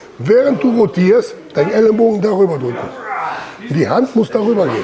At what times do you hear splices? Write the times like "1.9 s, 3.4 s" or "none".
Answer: none